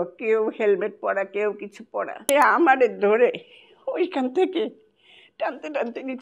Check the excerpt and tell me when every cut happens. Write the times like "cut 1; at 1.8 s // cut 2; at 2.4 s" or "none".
cut 1; at 2.2 s